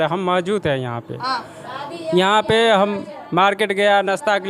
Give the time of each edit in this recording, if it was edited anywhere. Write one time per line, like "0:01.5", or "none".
none